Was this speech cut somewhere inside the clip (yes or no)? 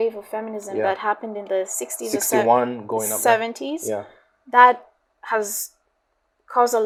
no